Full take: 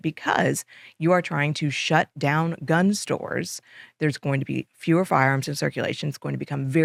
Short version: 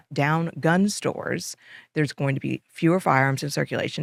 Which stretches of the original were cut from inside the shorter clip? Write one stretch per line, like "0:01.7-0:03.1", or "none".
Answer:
none